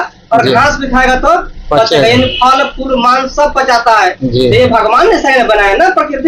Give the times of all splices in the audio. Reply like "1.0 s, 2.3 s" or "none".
none